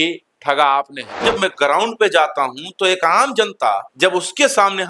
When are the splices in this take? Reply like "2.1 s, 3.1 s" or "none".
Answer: 1.2 s